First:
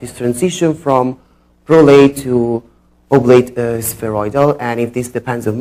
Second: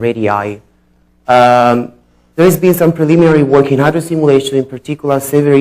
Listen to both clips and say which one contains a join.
first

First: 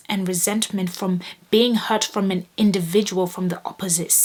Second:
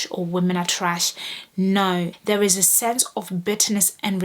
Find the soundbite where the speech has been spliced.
second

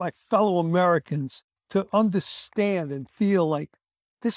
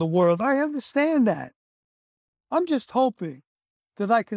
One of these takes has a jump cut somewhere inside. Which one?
first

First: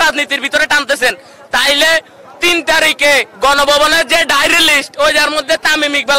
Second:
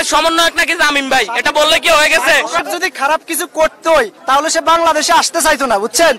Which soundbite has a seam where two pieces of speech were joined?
second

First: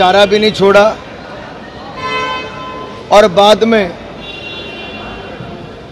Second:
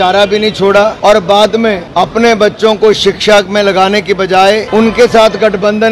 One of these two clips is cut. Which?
second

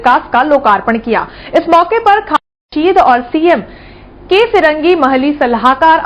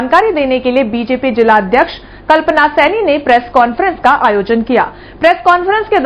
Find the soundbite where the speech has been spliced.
first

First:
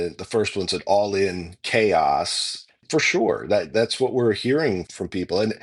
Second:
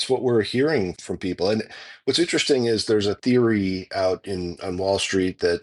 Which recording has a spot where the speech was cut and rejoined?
first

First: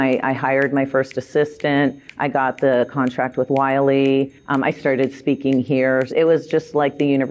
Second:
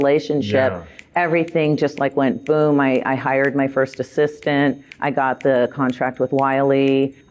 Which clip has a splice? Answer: first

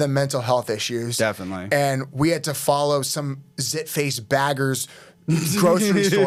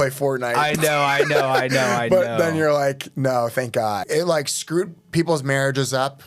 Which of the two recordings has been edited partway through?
second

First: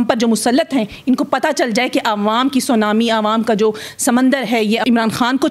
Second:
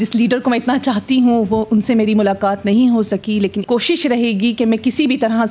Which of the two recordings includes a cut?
second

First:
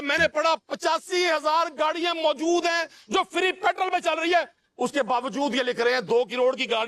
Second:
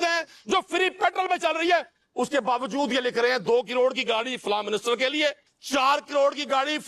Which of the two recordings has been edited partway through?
second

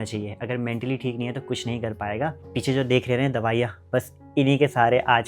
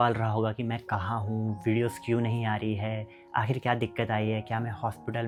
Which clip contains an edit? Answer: first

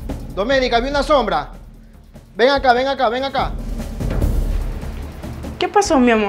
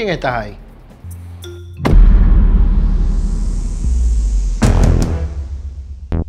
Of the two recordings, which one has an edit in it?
second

